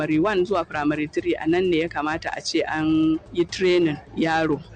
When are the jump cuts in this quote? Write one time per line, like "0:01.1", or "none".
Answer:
none